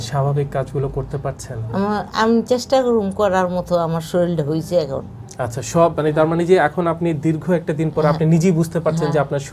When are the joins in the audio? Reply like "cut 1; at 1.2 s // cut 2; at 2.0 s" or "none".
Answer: none